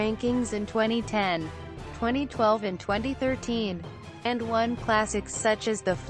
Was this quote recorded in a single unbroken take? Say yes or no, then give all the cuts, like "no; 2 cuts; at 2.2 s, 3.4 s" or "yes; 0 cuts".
yes; 0 cuts